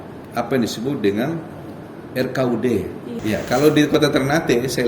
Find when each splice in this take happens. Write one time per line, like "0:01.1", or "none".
0:03.1